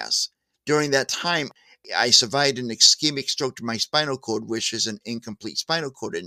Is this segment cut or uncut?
cut